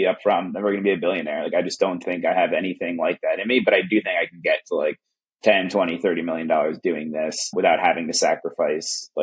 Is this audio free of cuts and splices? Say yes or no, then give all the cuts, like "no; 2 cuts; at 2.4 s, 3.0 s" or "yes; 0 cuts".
yes; 0 cuts